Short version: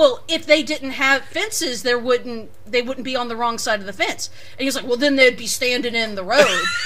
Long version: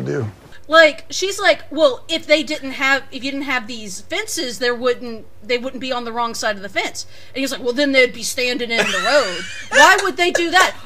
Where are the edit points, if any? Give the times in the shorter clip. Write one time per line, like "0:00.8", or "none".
0:01.3

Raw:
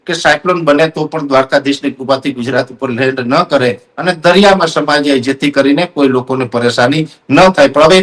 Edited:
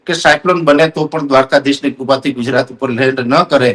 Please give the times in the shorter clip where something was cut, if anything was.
none

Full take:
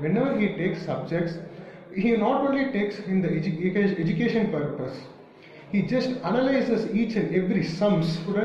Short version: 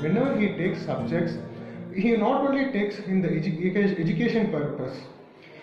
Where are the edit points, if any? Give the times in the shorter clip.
none

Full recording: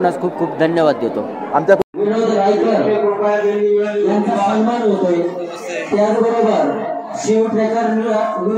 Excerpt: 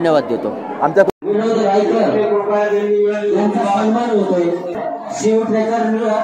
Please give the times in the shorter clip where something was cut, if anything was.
0:04.8

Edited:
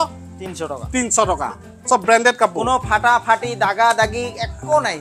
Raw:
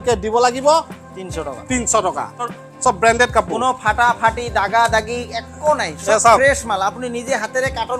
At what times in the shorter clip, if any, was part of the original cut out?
0:01.7

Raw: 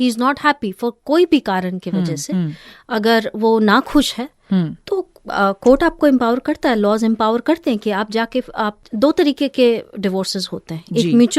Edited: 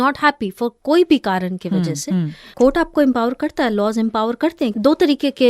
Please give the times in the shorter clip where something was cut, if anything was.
0:02.5
0:04.7

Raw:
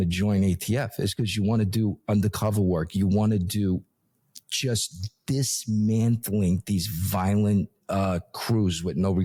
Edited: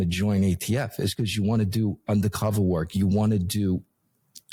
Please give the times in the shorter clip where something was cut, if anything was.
none

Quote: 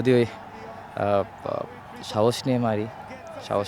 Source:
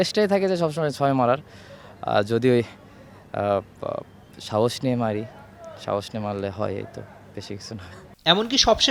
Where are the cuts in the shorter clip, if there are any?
none

